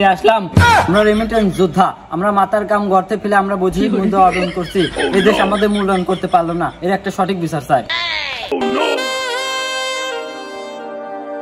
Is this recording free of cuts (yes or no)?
no